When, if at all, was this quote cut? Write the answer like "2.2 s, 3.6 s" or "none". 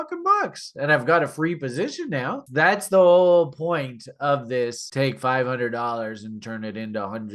2.4 s